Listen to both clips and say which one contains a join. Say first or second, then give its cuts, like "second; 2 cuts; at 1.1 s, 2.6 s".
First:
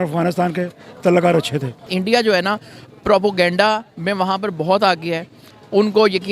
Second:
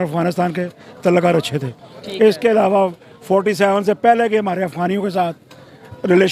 first; 1 cut; at 1.9 s